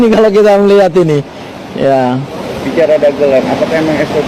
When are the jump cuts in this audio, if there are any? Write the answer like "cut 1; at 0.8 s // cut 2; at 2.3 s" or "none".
none